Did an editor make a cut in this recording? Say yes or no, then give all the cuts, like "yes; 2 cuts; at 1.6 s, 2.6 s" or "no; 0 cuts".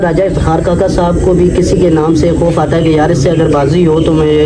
no; 0 cuts